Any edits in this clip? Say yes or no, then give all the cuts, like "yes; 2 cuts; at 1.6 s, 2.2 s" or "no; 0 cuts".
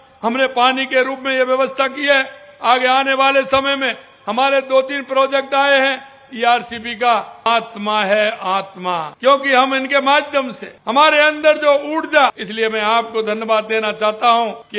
yes; 2 cuts; at 7.5 s, 12.4 s